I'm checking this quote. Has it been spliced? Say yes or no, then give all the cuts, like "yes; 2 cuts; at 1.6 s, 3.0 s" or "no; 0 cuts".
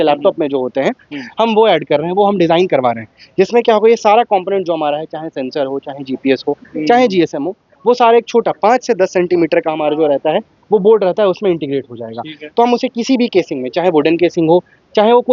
no; 0 cuts